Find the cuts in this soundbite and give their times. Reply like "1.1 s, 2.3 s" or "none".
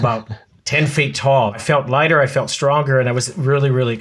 1.6 s